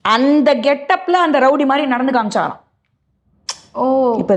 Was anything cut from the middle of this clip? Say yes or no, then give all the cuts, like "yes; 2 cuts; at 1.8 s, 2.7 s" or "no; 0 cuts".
no; 0 cuts